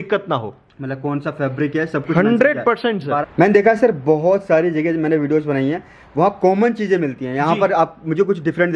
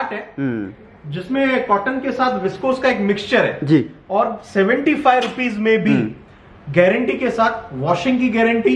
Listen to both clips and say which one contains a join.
first; 1 cut; at 3.2 s

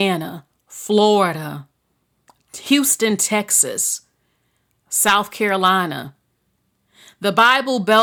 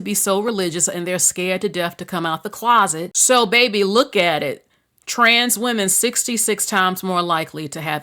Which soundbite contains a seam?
second; 1 cut; at 3.1 s

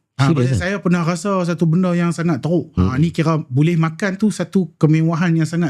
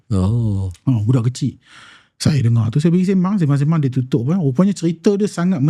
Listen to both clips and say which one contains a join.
first; 1 cut; at 2.7 s

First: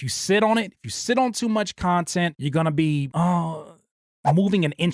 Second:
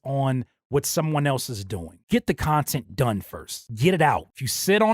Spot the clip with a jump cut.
second; 1 cut; at 2.0 s

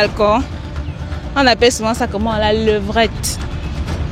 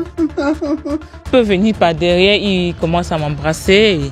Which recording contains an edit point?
second; 1 cut; at 1.3 s

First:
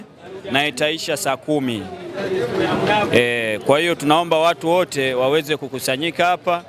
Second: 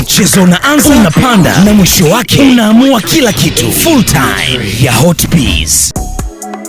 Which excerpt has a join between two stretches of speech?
second; 1 cut; at 5.8 s

